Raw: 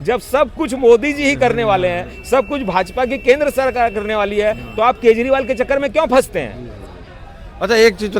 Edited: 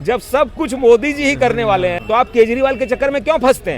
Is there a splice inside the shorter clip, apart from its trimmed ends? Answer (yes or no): yes